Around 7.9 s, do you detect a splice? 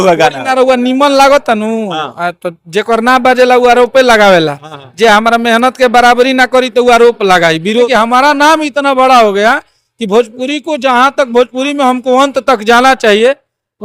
yes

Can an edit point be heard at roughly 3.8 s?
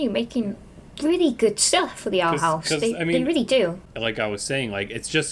yes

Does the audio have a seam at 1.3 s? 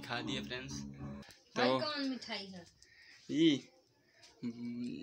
yes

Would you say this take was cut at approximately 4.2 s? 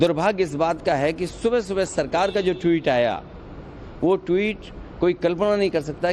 yes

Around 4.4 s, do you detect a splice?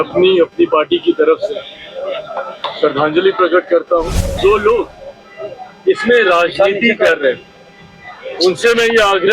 yes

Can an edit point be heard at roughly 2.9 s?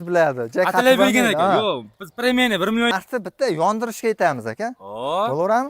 yes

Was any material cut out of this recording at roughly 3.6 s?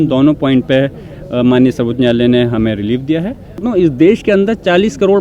yes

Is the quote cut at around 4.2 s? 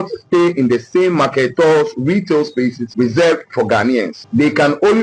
yes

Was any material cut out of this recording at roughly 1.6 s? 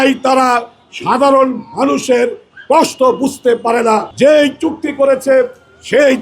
no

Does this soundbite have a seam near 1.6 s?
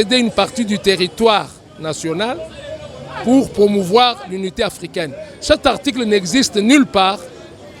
no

